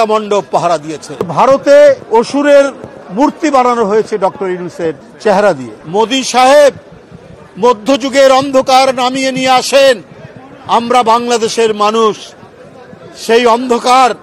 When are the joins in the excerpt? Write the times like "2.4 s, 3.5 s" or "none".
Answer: 1.3 s, 2.0 s, 5.1 s, 5.7 s